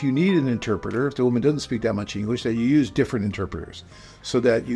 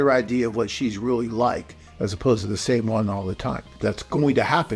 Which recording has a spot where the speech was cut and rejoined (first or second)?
second